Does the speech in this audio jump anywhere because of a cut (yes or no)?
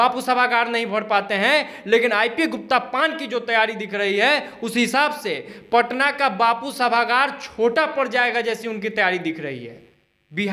no